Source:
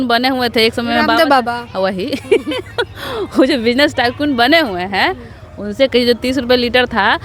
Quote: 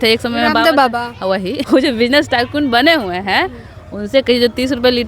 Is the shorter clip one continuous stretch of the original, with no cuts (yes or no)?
no